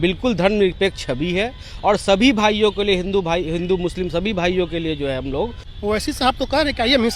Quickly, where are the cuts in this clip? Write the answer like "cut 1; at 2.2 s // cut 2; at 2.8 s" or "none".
cut 1; at 5.7 s

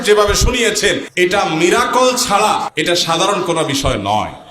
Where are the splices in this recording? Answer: cut 1; at 1.1 s // cut 2; at 2.7 s

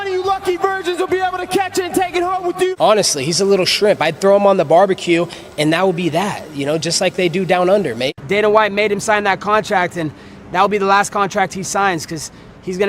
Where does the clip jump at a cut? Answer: cut 1; at 2.7 s // cut 2; at 8.2 s

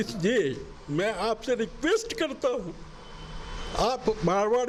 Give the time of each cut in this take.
none

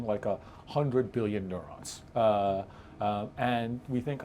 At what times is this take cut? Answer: none

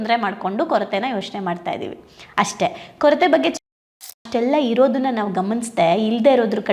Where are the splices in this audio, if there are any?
cut 1; at 4.0 s

